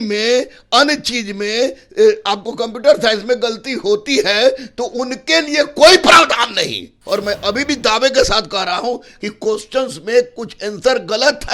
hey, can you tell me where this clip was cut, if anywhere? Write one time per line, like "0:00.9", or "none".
0:07.0